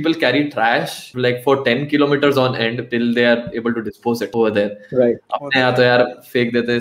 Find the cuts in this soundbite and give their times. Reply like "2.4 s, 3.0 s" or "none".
1.0 s, 2.8 s, 4.3 s